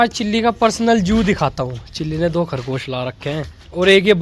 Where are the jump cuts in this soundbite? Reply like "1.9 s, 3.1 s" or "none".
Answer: none